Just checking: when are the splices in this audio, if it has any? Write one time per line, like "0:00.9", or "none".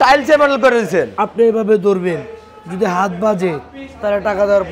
none